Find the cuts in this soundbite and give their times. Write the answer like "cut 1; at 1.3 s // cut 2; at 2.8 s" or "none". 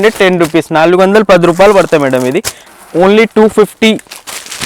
cut 1; at 2.6 s